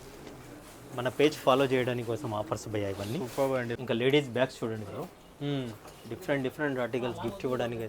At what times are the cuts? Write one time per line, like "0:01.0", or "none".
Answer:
0:03.8